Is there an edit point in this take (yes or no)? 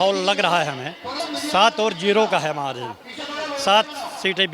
yes